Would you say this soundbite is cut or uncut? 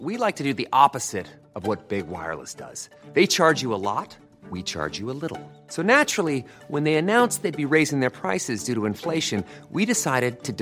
uncut